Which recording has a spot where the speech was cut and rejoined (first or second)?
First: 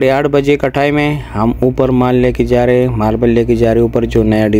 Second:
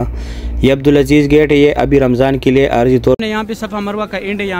second